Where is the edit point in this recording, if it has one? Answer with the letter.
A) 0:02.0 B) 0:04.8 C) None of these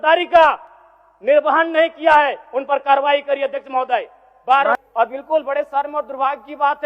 B